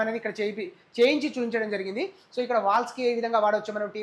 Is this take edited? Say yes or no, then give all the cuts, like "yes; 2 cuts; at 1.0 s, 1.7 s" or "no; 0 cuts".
no; 0 cuts